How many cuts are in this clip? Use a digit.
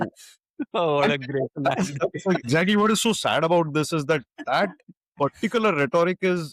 1